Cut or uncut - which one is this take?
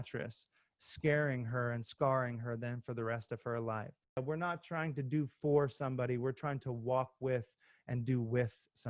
cut